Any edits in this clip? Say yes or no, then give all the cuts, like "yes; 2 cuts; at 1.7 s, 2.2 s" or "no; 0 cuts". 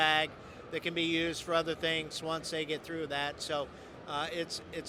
no; 0 cuts